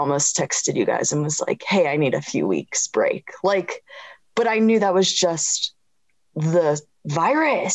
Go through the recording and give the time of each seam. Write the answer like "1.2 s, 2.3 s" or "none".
none